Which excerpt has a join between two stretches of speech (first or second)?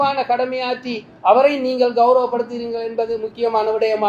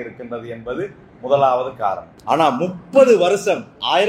second